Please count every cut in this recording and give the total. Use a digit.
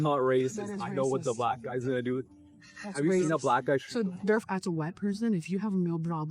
1